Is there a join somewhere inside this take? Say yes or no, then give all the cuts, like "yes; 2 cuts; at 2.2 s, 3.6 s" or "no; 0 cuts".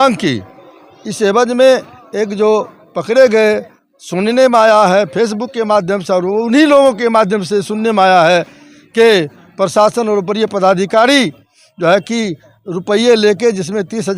no; 0 cuts